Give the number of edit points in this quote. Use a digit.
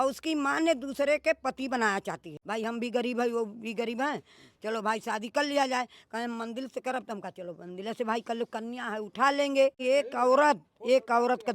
2